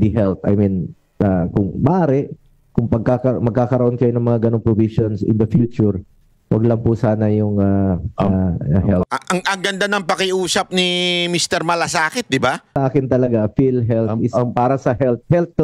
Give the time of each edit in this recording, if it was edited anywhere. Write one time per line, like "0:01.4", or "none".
0:12.8